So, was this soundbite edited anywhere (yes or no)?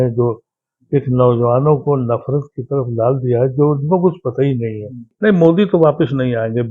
yes